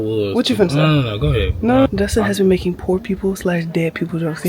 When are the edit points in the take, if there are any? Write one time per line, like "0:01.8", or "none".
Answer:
0:01.9